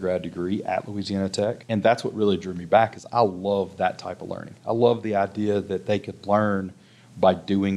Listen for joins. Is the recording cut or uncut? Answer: cut